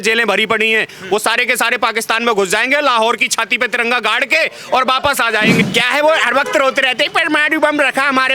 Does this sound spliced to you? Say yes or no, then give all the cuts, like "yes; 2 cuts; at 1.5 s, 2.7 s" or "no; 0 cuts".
yes; 1 cut; at 5.6 s